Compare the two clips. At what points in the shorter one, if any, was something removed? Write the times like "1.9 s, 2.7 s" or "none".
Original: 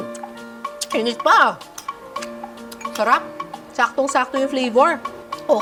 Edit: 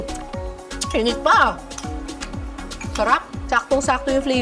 3.3 s